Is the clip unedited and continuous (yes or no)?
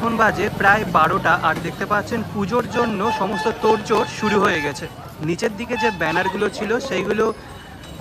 yes